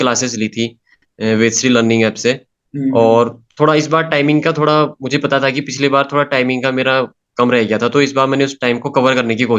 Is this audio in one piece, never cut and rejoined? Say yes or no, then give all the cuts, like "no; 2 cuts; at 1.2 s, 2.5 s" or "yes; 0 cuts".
yes; 0 cuts